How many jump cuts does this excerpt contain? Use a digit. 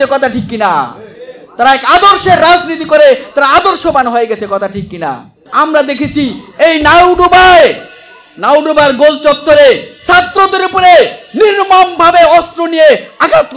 1